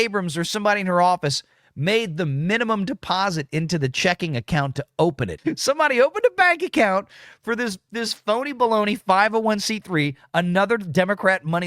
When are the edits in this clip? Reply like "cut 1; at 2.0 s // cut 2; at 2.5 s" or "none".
cut 1; at 5.5 s